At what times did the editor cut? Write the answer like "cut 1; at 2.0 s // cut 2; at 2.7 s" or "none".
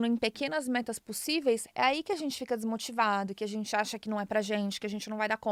none